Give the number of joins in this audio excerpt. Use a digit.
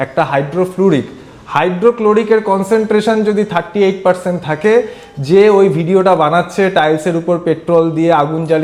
0